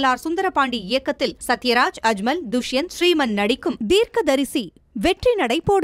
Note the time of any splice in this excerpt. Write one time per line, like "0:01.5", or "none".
0:03.8